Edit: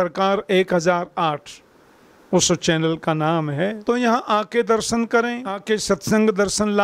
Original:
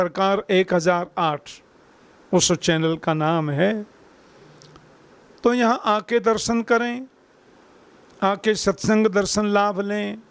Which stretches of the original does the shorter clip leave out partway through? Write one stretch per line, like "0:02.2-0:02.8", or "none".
0:03.8-0:05.3
0:07.1-0:08.3